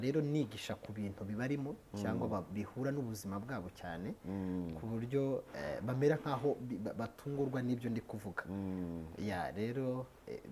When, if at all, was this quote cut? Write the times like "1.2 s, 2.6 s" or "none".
none